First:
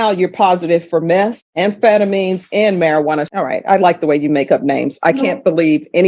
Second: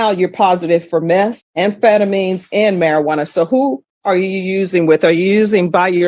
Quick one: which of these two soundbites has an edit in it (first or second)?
first